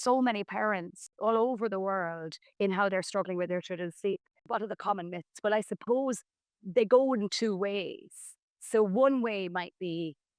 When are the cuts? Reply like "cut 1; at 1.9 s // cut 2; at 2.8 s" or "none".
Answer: cut 1; at 1.0 s // cut 2; at 4.4 s